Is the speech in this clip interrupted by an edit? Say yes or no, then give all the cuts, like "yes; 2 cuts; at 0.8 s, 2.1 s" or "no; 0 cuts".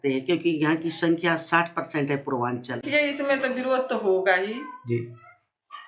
yes; 1 cut; at 2.8 s